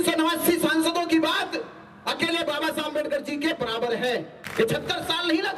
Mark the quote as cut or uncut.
cut